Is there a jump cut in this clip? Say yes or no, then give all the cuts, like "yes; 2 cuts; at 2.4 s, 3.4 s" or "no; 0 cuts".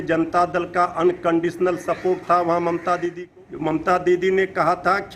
yes; 1 cut; at 3.2 s